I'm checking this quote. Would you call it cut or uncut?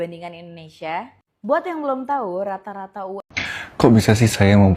cut